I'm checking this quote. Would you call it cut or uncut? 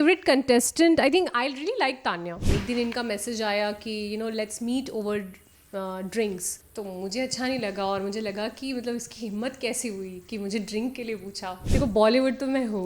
cut